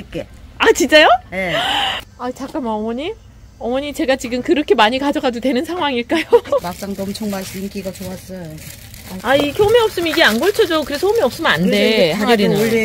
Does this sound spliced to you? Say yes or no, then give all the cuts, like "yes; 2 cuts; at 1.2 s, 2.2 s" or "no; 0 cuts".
yes; 3 cuts; at 2.0 s, 6.6 s, 9.1 s